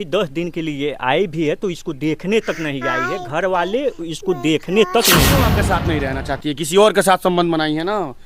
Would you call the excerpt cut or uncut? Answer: cut